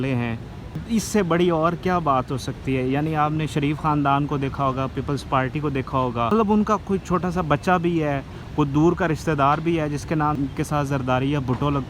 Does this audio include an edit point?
yes; 3 cuts; at 0.8 s, 6.3 s, 10.4 s

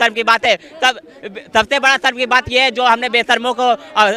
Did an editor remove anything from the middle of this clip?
no; 0 cuts

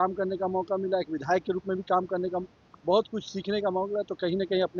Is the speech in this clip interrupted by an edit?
no; 0 cuts

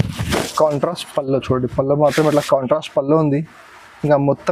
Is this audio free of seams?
yes; 0 cuts

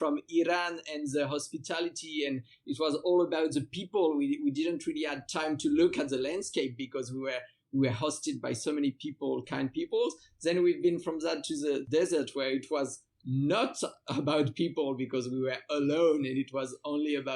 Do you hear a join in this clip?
no; 0 cuts

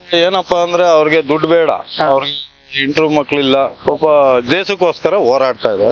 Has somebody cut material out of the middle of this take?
no; 0 cuts

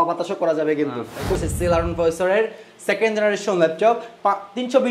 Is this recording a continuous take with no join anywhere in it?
no; 1 cut; at 1.4 s

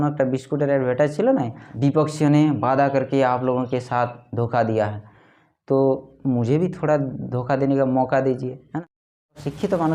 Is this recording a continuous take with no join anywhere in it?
no; 2 cuts; at 1.6 s, 9.0 s

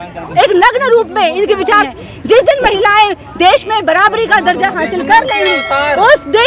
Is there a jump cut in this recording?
yes; 1 cut; at 1.8 s

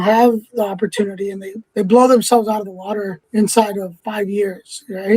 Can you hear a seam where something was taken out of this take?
yes; 3 cuts; at 1.5 s, 3.2 s, 4.0 s

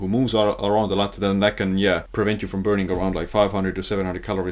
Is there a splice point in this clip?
yes; 1 cut; at 2.1 s

